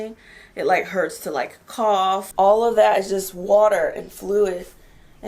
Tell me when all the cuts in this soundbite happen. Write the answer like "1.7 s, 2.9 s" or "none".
2.3 s